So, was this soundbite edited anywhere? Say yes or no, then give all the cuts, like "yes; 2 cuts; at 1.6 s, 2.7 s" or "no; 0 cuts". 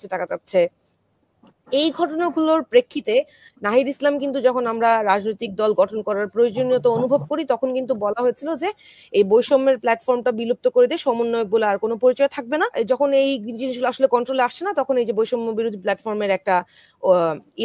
yes; 1 cut; at 12.7 s